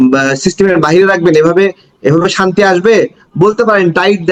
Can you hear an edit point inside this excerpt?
no; 0 cuts

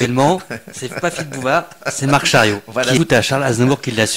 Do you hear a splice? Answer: yes; 1 cut; at 3.0 s

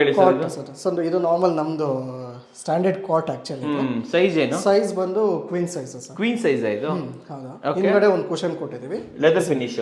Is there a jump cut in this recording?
no; 0 cuts

